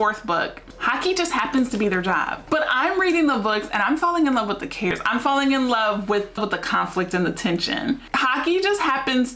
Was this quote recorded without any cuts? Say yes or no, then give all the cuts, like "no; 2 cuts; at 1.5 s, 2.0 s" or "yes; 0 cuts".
no; 4 cuts; at 2.4 s, 4.9 s, 6.4 s, 8.1 s